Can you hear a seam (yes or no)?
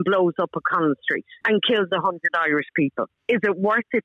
yes